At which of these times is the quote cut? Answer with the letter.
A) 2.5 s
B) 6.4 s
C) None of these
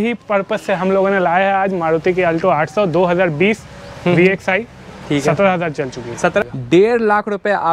B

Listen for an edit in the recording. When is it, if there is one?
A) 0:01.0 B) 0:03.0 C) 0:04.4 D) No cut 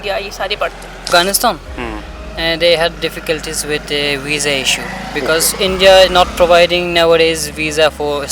A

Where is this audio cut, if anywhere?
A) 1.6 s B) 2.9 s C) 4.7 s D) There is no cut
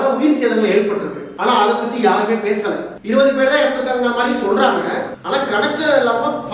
D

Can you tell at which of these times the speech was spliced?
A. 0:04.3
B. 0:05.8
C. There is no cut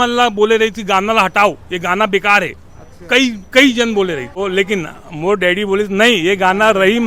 A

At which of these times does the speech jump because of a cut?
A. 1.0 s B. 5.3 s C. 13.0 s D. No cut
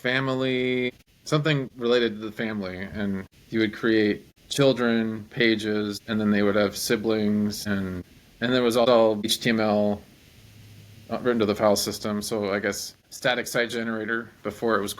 A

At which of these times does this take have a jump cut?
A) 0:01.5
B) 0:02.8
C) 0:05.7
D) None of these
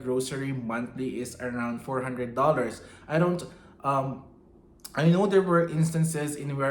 D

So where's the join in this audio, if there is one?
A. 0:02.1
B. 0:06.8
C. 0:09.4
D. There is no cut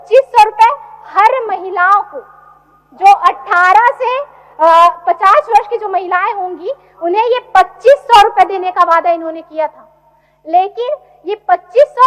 D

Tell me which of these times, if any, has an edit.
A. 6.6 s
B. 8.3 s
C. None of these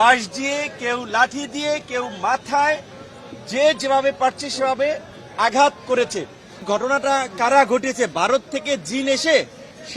A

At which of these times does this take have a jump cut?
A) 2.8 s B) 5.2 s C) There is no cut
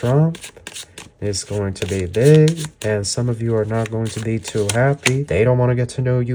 B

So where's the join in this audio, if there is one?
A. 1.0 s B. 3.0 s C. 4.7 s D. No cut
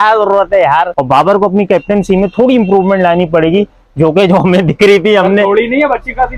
A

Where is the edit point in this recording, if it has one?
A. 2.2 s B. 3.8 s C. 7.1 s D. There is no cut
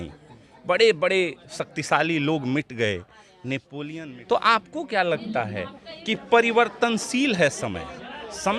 B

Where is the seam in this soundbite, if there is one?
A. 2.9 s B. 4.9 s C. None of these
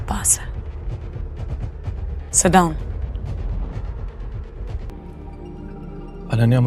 B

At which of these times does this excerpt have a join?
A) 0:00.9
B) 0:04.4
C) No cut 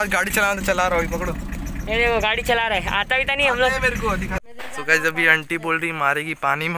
B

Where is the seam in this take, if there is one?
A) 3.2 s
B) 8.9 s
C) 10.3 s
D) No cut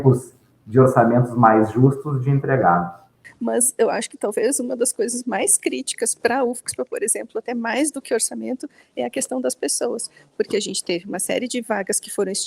A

